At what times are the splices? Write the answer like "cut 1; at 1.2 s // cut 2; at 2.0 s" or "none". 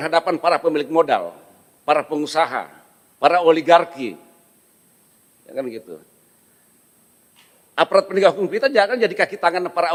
none